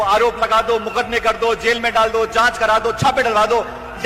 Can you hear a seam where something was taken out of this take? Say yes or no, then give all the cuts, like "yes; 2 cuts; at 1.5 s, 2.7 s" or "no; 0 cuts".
no; 0 cuts